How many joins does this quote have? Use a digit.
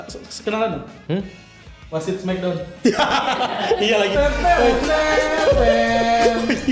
0